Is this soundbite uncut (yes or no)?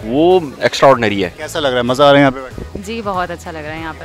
no